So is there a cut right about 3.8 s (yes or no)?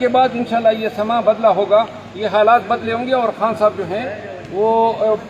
no